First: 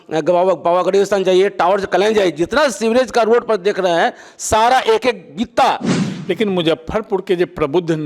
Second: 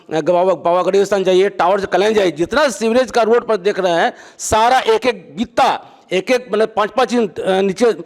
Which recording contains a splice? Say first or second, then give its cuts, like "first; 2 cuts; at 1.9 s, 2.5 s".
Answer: first; 1 cut; at 5.9 s